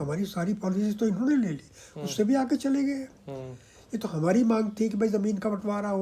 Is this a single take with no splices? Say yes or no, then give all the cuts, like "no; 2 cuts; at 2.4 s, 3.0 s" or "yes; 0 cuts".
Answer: yes; 0 cuts